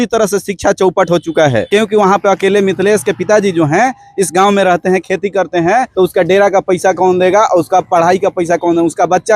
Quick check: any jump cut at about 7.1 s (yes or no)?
no